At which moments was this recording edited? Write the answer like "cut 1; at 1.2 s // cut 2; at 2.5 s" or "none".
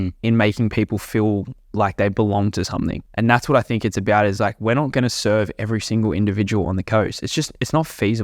cut 1; at 3.0 s